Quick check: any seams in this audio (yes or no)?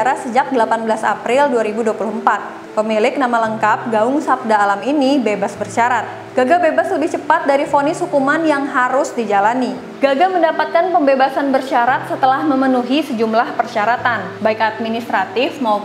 no